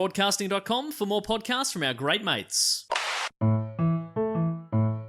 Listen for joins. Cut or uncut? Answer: cut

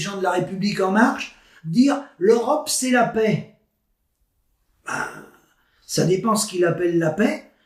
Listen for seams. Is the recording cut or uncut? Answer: uncut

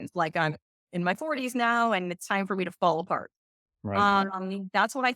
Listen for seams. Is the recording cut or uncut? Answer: uncut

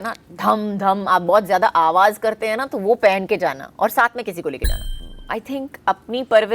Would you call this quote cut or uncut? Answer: cut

